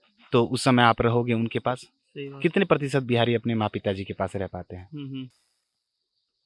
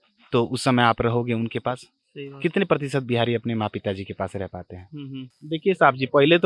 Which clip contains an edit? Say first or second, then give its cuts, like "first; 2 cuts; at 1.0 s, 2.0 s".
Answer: second; 1 cut; at 5.4 s